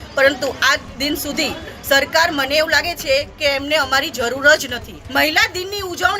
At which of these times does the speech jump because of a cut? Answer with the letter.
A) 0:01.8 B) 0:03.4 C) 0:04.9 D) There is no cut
C